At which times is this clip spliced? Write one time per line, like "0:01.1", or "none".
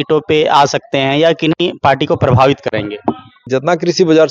0:03.4